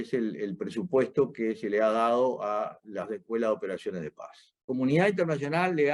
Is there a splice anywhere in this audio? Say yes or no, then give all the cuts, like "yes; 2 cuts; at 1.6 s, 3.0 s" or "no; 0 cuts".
yes; 1 cut; at 4.6 s